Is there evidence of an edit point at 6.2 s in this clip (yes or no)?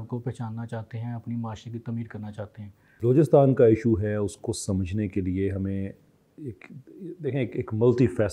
no